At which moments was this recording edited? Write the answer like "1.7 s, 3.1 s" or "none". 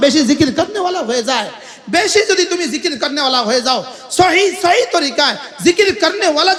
none